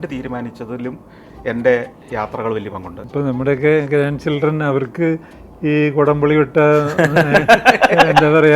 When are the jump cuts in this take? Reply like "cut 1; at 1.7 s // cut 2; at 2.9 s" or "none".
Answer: cut 1; at 3.0 s